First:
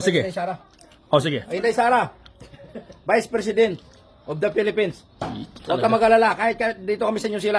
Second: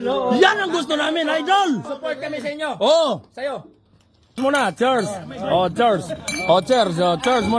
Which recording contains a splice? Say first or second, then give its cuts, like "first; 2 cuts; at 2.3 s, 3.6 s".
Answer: second; 1 cut; at 4.4 s